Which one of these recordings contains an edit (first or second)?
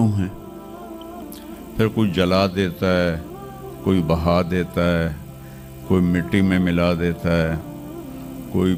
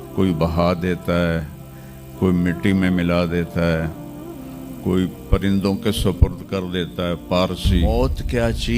second